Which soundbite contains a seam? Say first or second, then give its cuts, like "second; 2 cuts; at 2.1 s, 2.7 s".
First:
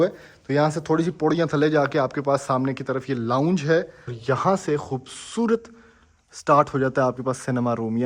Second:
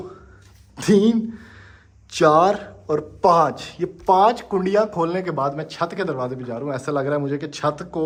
first; 1 cut; at 4.1 s